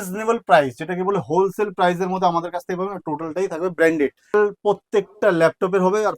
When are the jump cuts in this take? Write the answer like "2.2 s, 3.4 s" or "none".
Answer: 4.3 s